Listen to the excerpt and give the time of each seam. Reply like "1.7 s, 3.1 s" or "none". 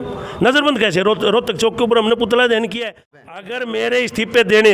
3.1 s